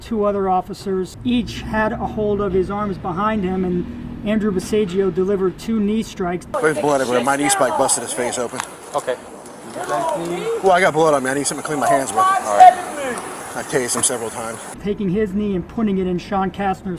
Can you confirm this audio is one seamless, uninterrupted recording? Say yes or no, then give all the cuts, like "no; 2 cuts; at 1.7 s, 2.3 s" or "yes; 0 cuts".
no; 4 cuts; at 1.1 s, 6.6 s, 13.4 s, 14.7 s